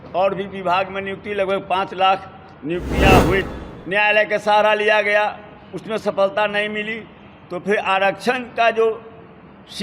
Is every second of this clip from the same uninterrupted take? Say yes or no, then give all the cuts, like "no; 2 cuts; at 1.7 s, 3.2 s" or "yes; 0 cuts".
no; 1 cut; at 3.4 s